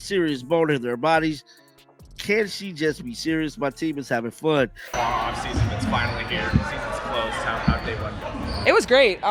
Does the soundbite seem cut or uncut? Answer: cut